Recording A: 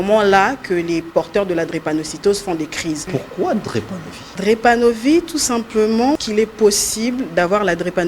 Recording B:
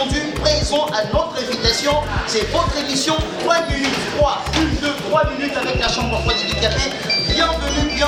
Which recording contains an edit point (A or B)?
A